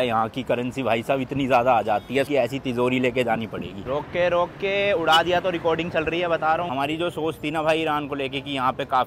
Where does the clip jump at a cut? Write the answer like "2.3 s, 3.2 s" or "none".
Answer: 2.3 s, 3.9 s, 6.7 s